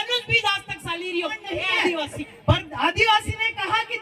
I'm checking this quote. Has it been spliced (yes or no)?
yes